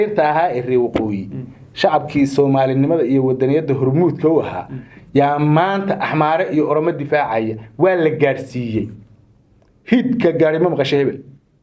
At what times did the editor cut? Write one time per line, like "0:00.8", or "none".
none